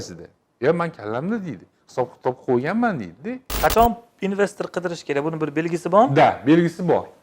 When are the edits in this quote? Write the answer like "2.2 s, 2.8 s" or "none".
3.4 s